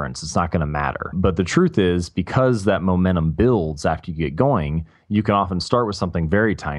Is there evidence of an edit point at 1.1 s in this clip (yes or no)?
yes